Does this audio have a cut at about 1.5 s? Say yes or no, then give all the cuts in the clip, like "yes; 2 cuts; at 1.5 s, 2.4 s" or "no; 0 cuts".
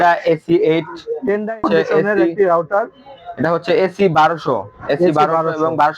yes; 1 cut; at 1.5 s